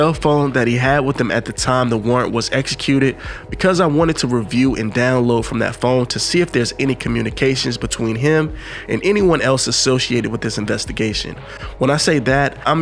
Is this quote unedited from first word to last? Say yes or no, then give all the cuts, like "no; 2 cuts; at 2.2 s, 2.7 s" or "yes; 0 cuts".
yes; 0 cuts